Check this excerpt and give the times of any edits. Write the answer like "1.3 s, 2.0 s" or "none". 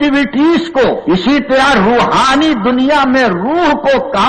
1.0 s

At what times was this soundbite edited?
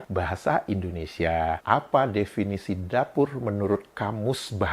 1.6 s

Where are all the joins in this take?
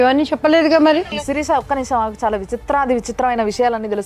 1.0 s

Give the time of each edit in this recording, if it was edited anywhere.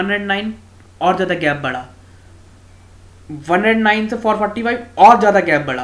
4.5 s

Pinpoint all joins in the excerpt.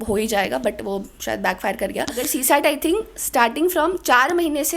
2.3 s

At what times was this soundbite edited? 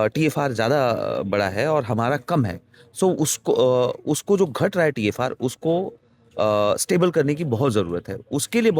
none

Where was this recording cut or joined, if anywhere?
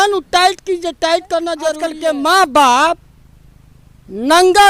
1.9 s

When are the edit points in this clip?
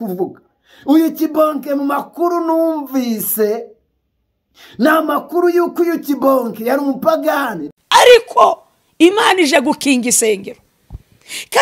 7.6 s

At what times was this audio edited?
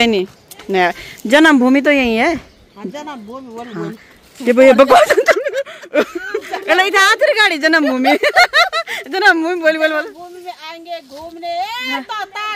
none

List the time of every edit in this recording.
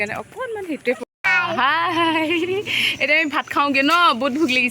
1.2 s

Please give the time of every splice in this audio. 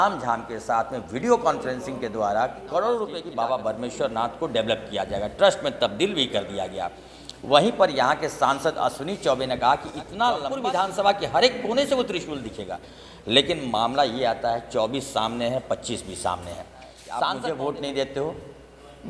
3.2 s, 10.5 s, 17.2 s

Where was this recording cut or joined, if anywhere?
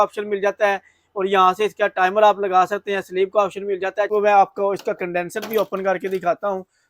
4.1 s

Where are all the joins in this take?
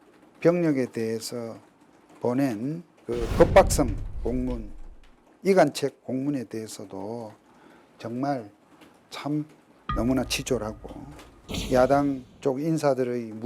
2.9 s, 9.7 s, 11.3 s, 12.3 s

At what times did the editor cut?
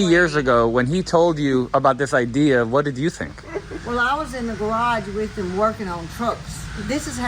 none

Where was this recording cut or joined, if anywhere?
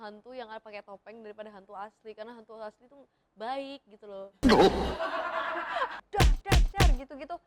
5.9 s

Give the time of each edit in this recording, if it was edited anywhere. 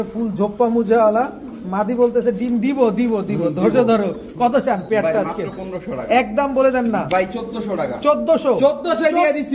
none

